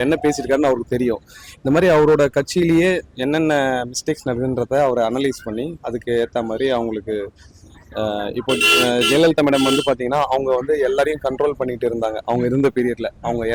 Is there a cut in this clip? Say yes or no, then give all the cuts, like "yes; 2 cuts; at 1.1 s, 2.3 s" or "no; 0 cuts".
no; 0 cuts